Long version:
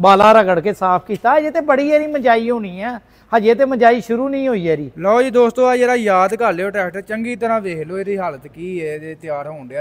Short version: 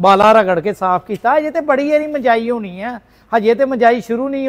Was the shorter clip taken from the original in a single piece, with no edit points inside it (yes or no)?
yes